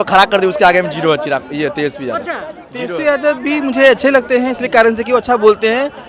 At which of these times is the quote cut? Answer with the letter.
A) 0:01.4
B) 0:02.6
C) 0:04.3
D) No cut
B